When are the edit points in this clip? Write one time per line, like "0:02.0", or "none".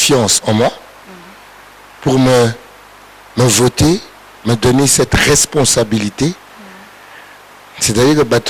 none

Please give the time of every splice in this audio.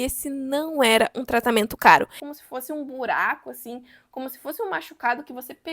0:02.2

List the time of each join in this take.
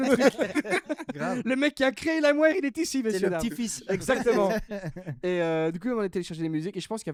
none

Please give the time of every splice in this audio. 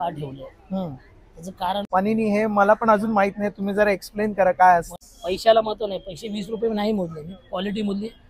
0:01.9
0:05.0

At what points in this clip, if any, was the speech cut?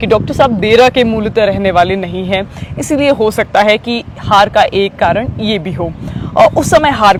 none

